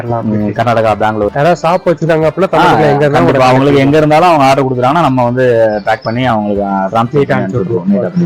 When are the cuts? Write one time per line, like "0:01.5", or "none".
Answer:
0:01.3

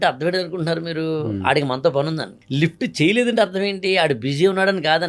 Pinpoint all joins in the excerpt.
0:02.4

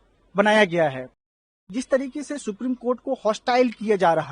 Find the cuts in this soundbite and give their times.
0:01.2

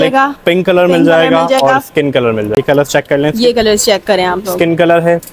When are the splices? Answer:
0:02.4

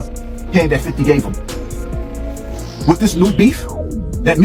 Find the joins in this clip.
none

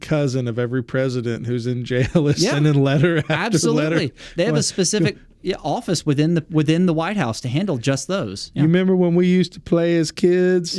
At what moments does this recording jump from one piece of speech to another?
none

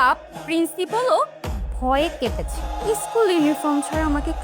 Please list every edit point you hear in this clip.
0:02.6

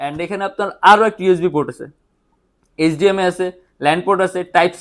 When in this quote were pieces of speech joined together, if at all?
none

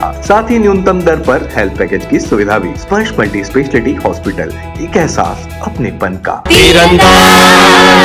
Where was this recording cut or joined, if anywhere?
none

